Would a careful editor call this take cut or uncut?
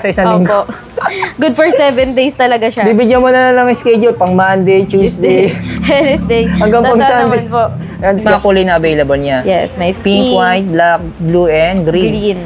cut